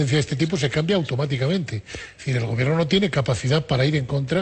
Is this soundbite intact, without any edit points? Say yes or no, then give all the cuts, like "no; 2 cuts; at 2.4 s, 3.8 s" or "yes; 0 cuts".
no; 1 cut; at 1.7 s